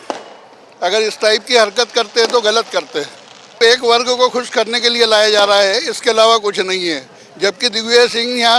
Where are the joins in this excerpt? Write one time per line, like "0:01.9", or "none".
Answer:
0:03.6